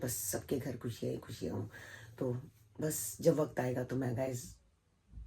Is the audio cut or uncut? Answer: uncut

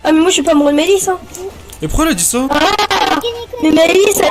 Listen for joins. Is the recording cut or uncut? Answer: uncut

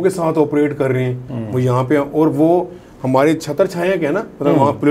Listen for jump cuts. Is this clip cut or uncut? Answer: uncut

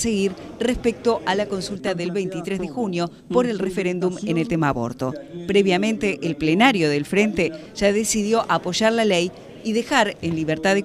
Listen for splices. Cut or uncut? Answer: uncut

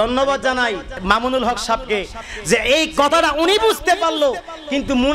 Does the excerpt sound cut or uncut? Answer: cut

